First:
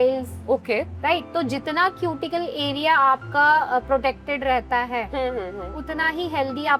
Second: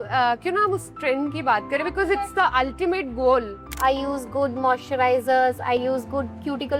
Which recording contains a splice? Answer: second; 2 cuts; at 3.8 s, 5.8 s

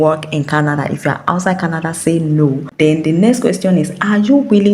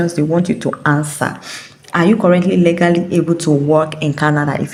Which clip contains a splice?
first; 1 cut; at 2.7 s

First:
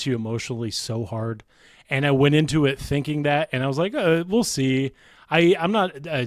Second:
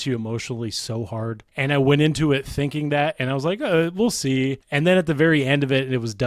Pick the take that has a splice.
second; 2 cuts; at 1.5 s, 4.6 s

